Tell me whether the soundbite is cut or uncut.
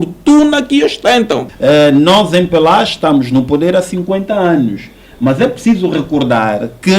cut